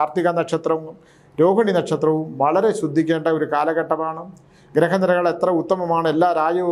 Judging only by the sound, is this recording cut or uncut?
uncut